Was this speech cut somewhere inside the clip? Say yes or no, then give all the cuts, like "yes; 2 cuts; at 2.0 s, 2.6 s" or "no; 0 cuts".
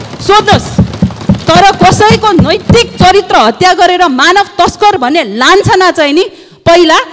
no; 0 cuts